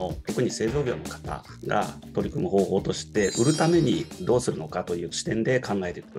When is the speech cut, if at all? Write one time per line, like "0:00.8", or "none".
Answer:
none